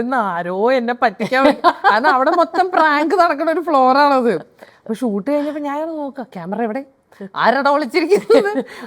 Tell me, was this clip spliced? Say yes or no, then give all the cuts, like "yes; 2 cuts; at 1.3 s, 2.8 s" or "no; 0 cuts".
no; 0 cuts